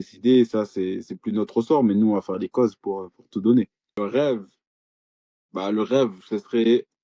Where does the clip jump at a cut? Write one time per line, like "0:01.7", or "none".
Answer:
0:04.0